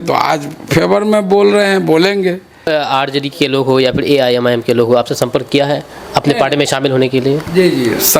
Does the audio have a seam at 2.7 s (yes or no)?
yes